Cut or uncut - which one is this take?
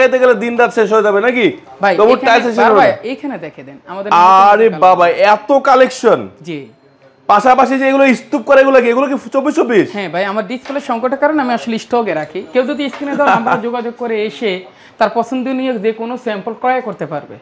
uncut